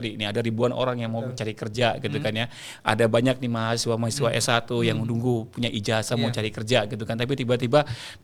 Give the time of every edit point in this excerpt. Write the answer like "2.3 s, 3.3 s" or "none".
none